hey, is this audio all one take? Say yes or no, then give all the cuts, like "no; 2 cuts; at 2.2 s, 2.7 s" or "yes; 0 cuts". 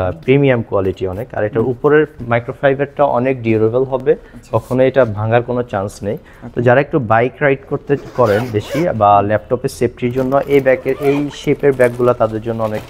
yes; 0 cuts